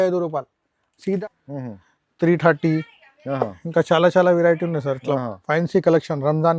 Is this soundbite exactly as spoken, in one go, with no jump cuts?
no; 1 cut; at 1.2 s

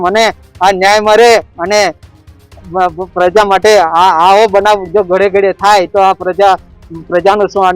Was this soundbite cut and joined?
no; 0 cuts

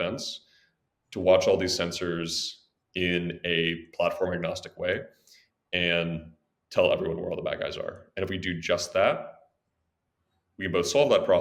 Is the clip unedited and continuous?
yes; 0 cuts

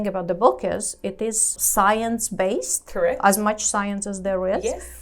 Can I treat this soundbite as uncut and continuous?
no; 1 cut; at 1.5 s

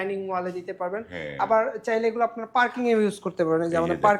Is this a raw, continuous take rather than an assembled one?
yes; 0 cuts

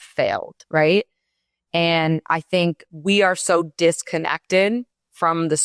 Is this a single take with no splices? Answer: no; 1 cut; at 2.9 s

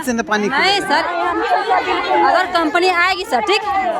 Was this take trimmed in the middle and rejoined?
no; 0 cuts

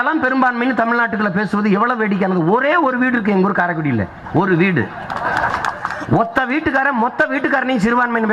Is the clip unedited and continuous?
yes; 0 cuts

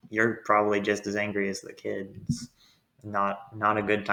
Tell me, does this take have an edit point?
no; 0 cuts

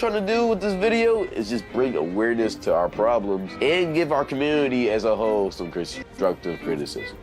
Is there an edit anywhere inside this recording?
no; 0 cuts

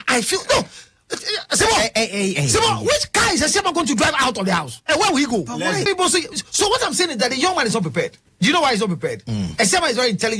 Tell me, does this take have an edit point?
yes; 1 cut; at 5.9 s

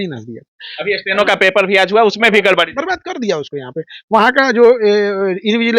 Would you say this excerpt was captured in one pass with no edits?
yes; 0 cuts

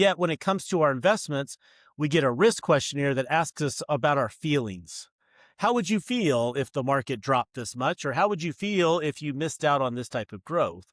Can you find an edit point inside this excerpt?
no; 0 cuts

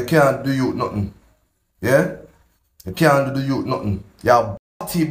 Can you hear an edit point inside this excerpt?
yes; 1 cut; at 4.0 s

